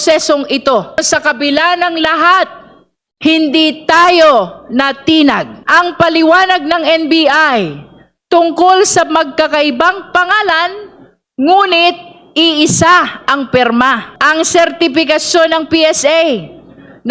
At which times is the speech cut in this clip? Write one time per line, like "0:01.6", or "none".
0:01.0
0:05.5
0:14.1